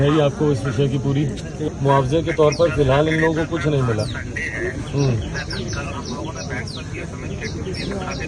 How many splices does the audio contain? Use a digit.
1